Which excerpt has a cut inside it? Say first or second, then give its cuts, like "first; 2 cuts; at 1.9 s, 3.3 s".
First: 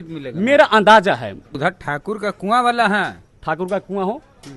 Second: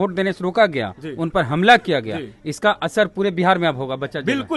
first; 2 cuts; at 1.5 s, 3.3 s